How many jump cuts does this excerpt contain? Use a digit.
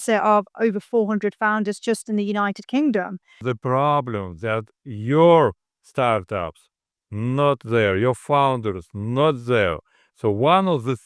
1